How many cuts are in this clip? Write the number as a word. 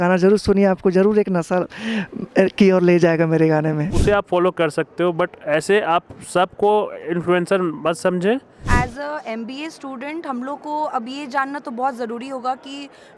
two